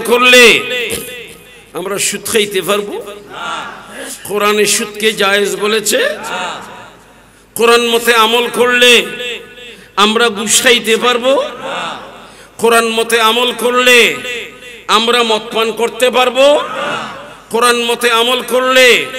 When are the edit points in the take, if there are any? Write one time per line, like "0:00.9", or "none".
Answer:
none